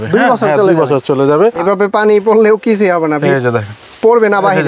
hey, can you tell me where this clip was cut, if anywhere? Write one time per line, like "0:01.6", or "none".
0:01.6